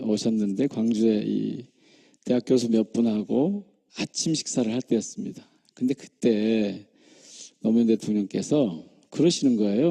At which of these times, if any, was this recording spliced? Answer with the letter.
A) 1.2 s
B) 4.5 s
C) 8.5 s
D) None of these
B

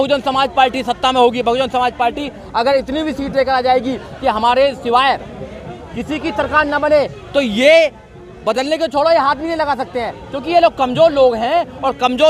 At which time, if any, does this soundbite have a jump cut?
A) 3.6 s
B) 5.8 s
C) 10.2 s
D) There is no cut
D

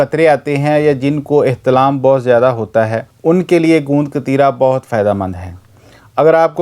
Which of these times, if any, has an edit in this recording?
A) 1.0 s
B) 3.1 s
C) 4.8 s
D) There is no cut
B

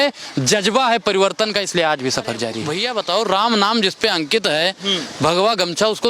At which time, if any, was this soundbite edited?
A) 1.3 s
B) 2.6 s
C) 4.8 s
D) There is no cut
B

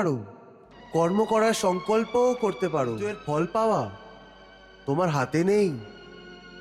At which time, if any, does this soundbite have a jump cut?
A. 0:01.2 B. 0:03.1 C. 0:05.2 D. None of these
B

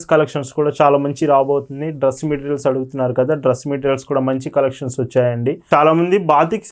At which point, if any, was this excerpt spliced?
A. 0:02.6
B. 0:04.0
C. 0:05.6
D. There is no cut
C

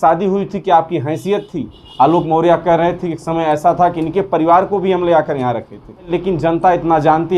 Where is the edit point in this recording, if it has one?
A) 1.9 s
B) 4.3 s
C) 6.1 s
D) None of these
C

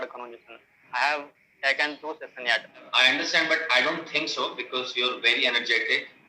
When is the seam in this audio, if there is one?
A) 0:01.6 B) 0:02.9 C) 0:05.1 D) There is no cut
B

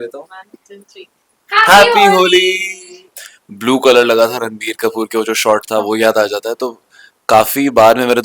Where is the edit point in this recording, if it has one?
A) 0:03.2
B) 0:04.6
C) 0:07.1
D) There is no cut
A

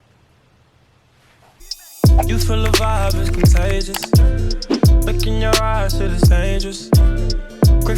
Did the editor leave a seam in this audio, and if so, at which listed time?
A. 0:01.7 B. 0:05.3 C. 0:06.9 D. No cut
A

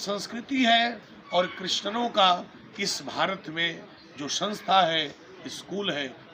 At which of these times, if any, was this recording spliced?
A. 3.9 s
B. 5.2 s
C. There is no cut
C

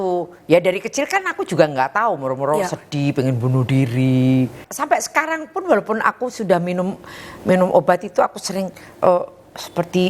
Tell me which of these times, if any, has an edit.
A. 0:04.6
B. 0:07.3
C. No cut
A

